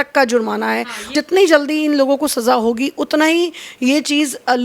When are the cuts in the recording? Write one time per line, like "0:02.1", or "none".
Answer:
0:01.1